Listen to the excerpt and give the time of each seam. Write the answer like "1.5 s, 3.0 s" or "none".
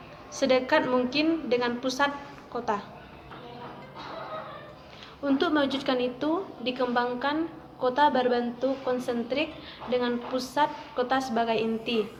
none